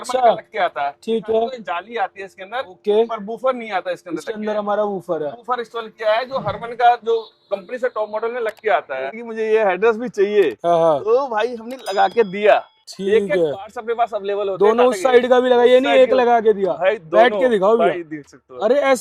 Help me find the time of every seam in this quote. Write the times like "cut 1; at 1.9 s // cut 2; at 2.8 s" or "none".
cut 1; at 9.2 s